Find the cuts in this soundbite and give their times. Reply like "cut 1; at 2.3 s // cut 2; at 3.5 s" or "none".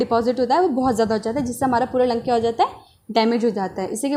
none